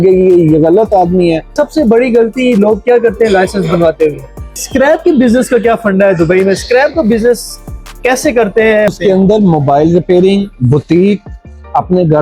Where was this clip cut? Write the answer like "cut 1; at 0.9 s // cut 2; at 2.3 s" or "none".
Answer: cut 1; at 1.5 s // cut 2; at 4.6 s // cut 3; at 8.9 s